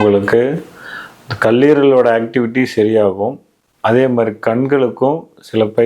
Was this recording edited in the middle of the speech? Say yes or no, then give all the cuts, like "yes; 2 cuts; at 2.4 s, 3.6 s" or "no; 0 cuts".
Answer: no; 0 cuts